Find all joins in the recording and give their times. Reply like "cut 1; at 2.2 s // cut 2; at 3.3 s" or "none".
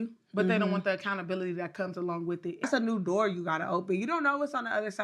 cut 1; at 2.7 s